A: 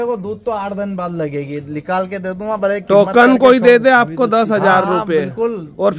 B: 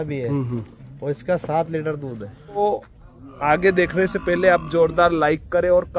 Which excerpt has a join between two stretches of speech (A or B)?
B